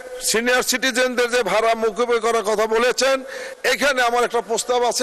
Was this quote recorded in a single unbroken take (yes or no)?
yes